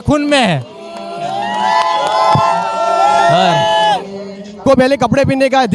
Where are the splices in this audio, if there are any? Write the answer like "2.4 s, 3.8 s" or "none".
4.6 s